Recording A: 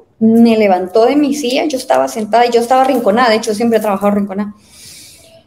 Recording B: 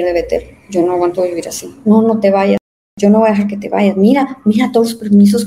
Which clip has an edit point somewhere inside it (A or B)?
B